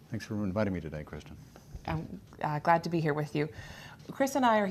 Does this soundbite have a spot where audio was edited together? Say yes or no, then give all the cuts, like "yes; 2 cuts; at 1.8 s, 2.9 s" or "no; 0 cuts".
yes; 1 cut; at 3.6 s